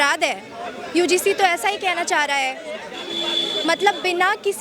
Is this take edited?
no; 0 cuts

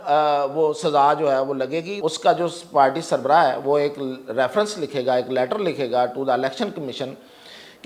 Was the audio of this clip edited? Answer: yes; 1 cut; at 2.0 s

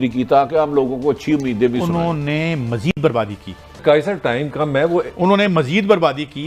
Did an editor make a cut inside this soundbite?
no; 0 cuts

